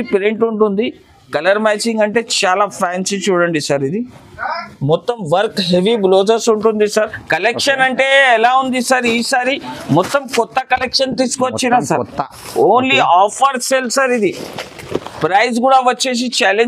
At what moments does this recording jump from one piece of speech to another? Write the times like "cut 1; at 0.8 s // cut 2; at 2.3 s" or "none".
cut 1; at 7.2 s